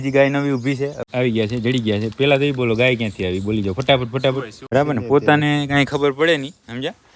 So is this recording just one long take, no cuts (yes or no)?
no